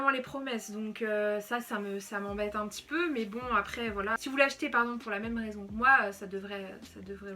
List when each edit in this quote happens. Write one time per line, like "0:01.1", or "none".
none